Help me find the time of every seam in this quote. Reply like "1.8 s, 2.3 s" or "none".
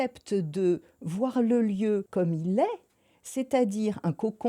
2.1 s